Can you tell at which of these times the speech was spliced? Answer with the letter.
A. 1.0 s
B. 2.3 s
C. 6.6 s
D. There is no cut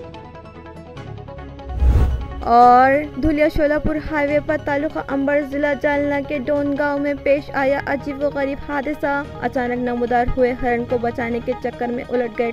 D